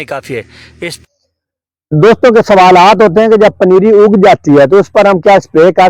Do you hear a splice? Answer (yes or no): yes